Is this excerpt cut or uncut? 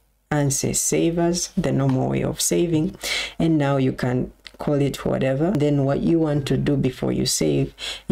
cut